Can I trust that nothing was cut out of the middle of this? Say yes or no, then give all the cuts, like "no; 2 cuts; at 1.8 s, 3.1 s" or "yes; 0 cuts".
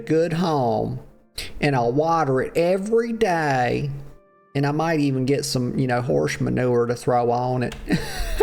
yes; 0 cuts